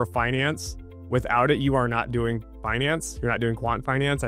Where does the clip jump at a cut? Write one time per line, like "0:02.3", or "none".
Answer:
none